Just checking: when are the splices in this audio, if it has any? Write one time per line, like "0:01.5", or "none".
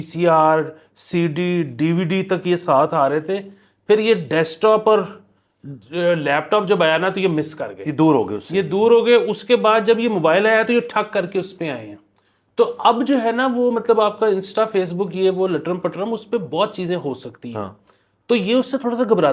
none